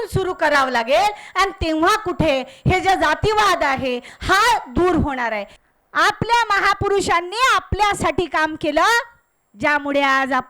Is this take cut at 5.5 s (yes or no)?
yes